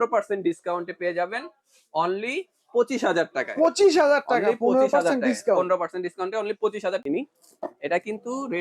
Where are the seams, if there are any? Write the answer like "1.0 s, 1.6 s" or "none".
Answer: 7.0 s